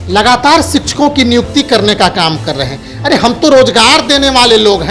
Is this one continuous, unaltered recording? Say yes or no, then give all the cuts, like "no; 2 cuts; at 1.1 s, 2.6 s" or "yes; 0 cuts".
yes; 0 cuts